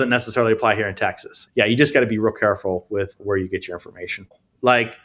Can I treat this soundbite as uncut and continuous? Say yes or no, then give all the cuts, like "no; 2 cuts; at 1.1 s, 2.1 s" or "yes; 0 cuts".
no; 3 cuts; at 1.3 s, 3.2 s, 4.2 s